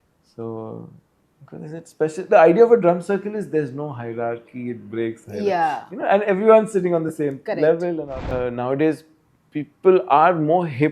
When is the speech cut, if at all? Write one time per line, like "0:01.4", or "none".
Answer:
0:08.2